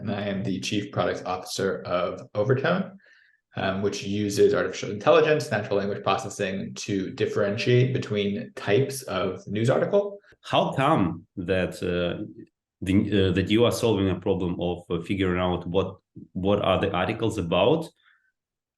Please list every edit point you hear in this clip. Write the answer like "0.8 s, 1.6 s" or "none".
10.3 s